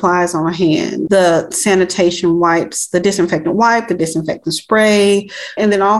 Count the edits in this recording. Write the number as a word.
one